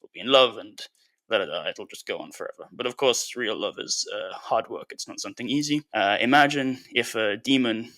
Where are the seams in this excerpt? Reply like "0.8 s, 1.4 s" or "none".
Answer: 5.9 s